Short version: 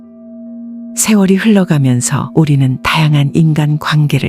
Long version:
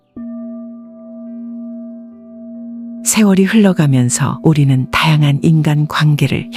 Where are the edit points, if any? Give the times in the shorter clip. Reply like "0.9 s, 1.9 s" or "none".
1.0 s